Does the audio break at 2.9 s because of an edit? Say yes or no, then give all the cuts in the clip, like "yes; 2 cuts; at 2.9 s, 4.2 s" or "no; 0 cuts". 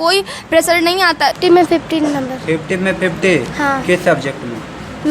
no; 1 cut; at 1.3 s